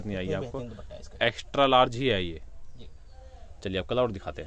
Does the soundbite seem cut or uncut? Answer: uncut